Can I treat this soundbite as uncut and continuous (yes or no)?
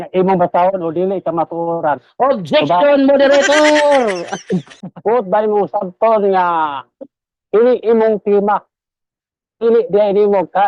no